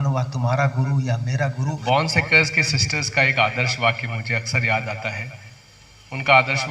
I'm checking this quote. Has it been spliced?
yes; 1 cut; at 1.8 s

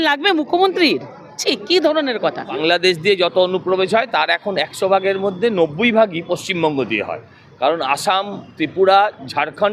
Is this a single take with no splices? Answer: no; 1 cut; at 2.5 s

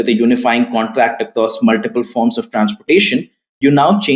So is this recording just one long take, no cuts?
yes; 0 cuts

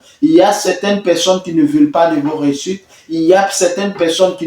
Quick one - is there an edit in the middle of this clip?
no; 0 cuts

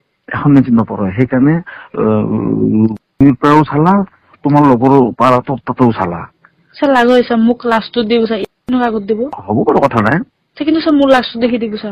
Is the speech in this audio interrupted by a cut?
no; 0 cuts

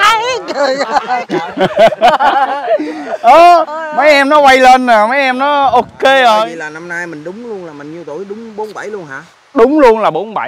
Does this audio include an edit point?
yes; 1 cut; at 6.5 s

